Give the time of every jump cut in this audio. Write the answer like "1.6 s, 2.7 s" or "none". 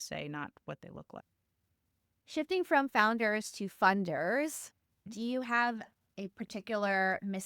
5.0 s